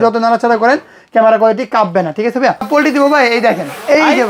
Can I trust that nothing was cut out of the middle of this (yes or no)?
no